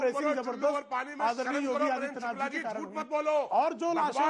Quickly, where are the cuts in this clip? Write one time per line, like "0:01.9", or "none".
none